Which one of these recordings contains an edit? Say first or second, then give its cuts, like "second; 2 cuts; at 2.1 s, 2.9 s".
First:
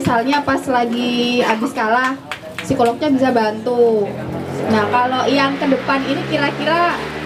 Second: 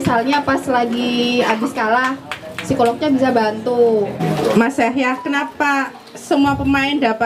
second; 1 cut; at 4.2 s